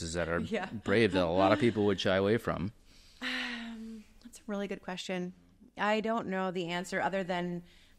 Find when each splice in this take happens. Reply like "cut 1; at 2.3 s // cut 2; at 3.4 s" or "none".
none